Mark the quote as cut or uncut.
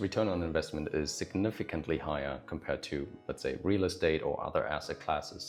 uncut